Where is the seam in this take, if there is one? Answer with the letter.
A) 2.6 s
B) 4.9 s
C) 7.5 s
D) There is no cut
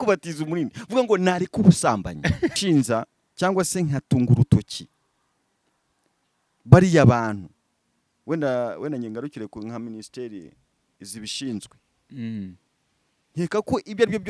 A